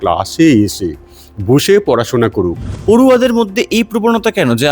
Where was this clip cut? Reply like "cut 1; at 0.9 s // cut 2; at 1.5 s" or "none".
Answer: cut 1; at 2.7 s